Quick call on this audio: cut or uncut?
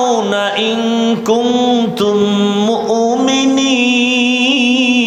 uncut